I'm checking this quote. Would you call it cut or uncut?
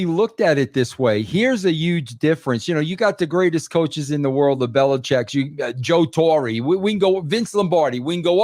uncut